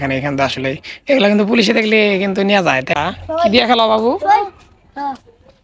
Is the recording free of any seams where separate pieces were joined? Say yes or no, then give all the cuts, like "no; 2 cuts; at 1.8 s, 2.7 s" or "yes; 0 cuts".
no; 1 cut; at 3.0 s